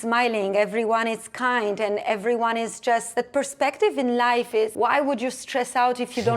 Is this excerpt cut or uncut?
cut